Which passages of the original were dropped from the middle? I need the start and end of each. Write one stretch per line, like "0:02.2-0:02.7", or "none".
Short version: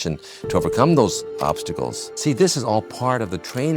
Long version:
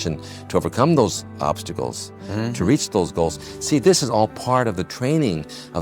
0:02.0-0:03.5